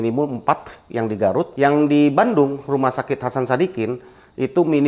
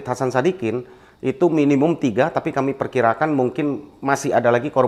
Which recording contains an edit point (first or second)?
first